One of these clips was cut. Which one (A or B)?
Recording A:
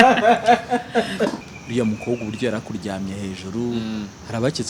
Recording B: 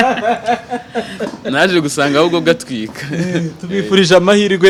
A